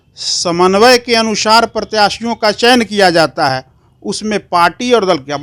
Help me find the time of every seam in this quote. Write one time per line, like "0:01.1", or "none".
none